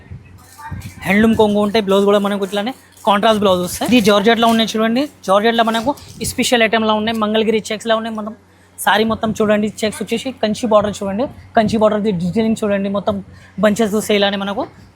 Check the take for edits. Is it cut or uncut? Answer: cut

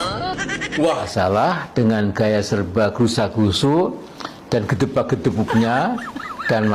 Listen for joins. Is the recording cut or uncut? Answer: cut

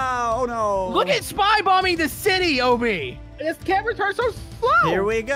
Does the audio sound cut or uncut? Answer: cut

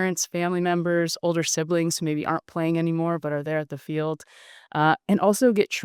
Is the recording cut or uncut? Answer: uncut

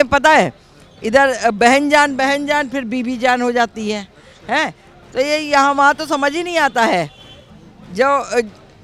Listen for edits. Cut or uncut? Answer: uncut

